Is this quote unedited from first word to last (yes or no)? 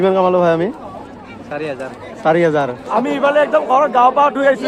no